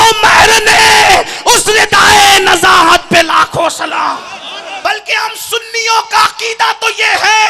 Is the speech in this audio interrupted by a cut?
yes; 1 cut; at 4.6 s

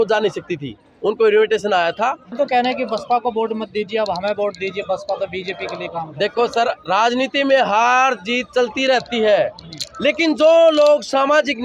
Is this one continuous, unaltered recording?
no; 1 cut; at 2.3 s

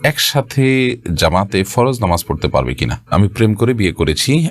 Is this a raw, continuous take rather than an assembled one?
no; 1 cut; at 3.1 s

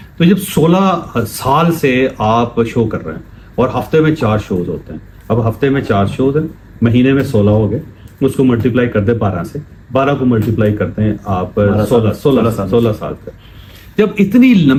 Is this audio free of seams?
yes; 0 cuts

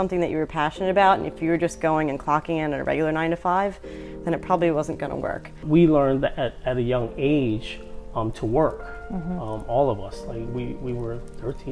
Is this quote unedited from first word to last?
no; 1 cut; at 5.6 s

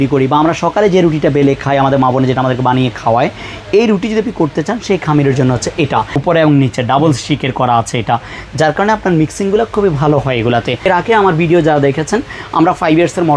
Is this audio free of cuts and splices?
no; 2 cuts; at 6.1 s, 10.9 s

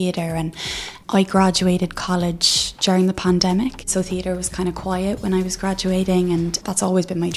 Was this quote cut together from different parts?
yes; 2 cuts; at 3.9 s, 6.6 s

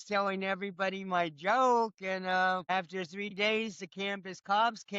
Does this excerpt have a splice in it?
yes; 1 cut; at 2.7 s

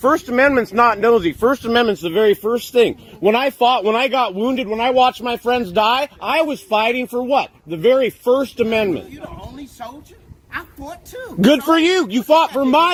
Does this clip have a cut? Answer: no; 0 cuts

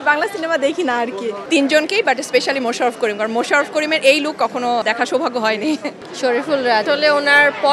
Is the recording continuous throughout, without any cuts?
no; 4 cuts; at 1.4 s, 4.8 s, 6.0 s, 6.8 s

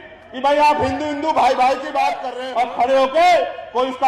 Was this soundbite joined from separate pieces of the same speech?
yes; 1 cut; at 2.3 s

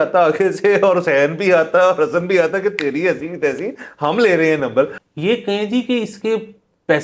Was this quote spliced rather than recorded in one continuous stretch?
yes; 1 cut; at 5.0 s

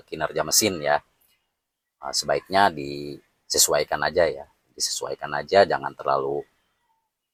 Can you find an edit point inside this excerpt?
no; 0 cuts

